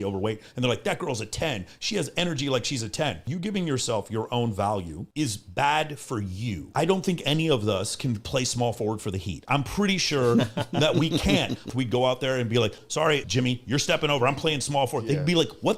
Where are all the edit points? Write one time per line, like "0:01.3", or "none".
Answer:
0:03.3
0:06.7
0:11.7
0:13.1